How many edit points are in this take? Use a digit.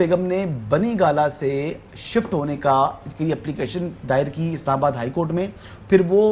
0